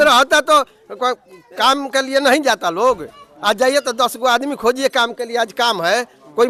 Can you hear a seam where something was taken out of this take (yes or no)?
no